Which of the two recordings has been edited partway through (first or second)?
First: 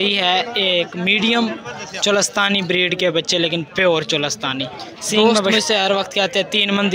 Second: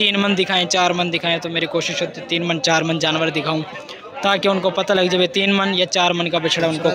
first